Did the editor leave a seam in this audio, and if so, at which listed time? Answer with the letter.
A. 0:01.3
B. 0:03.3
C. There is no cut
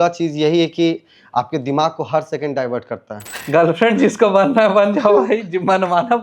B